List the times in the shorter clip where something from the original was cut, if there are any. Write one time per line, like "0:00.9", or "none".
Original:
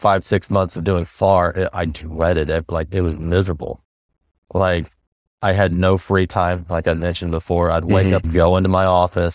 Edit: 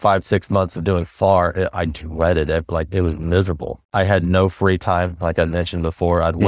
0:03.7